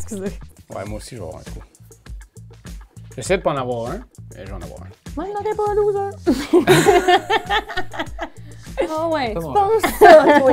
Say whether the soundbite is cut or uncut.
uncut